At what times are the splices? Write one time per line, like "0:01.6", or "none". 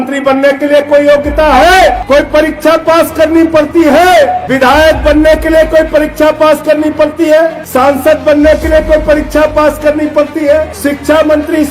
0:02.0
0:04.4
0:07.6
0:10.7